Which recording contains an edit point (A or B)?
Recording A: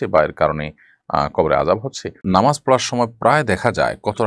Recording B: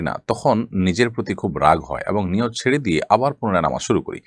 A